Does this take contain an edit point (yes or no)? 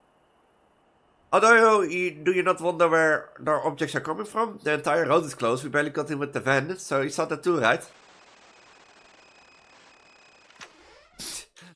yes